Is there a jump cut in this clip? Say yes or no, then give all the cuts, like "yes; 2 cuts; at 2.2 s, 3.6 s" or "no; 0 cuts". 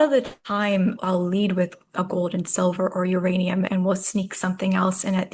yes; 2 cuts; at 1.0 s, 3.7 s